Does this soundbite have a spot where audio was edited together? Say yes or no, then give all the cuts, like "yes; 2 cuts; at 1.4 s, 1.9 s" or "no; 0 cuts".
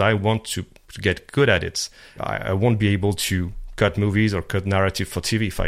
yes; 1 cut; at 2.2 s